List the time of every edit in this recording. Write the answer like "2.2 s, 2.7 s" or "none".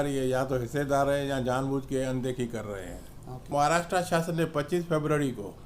3.5 s